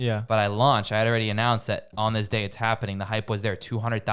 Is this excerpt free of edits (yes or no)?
yes